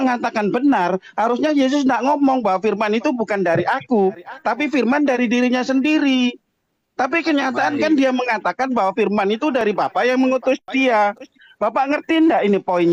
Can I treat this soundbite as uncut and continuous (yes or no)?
yes